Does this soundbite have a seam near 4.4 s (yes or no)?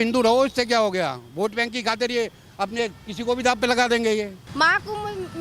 yes